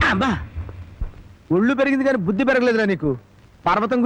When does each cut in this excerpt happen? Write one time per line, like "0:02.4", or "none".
none